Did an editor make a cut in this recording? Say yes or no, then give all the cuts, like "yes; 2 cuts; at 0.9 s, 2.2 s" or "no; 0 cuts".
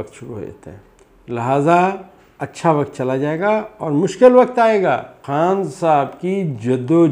yes; 1 cut; at 5.2 s